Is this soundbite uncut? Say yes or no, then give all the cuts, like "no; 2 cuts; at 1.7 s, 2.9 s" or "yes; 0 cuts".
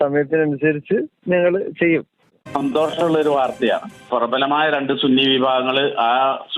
no; 1 cut; at 2.3 s